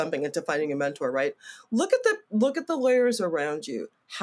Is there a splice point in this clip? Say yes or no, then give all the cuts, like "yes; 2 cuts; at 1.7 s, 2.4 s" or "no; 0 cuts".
no; 0 cuts